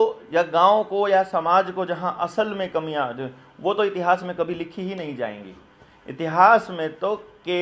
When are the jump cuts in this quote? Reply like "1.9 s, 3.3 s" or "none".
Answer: none

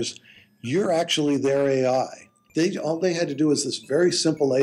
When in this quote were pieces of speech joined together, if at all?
2.4 s

